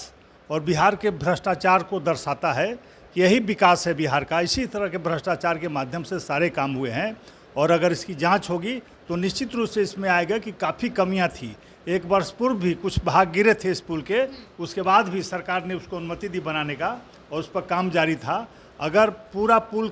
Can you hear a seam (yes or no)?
no